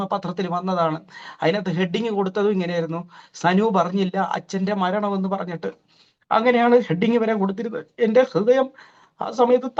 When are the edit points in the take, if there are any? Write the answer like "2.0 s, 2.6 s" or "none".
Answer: none